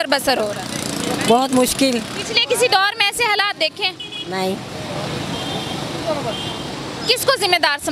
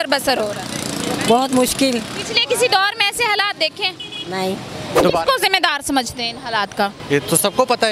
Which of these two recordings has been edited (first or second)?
second